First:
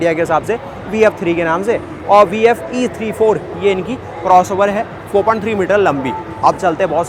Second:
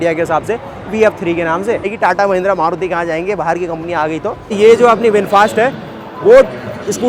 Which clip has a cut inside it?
second; 2 cuts; at 1.9 s, 4.6 s

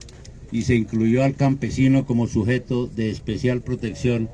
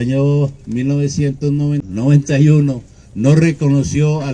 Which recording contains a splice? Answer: second; 1 cut; at 1.8 s

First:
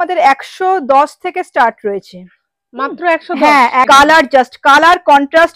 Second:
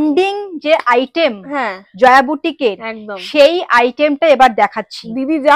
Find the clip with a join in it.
first; 1 cut; at 3.9 s

